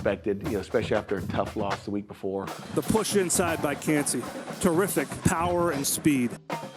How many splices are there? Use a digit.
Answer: 1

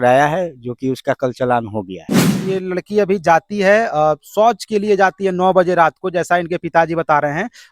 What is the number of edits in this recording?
1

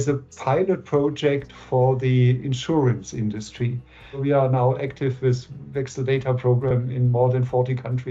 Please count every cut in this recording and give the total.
1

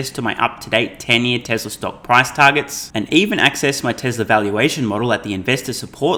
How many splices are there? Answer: 0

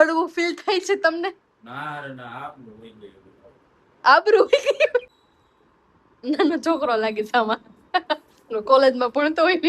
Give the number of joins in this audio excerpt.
1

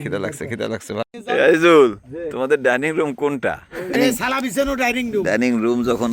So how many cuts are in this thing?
2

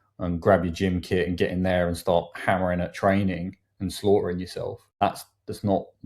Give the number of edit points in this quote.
1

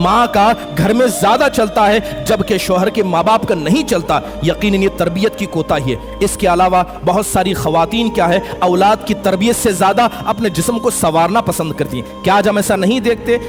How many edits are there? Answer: 0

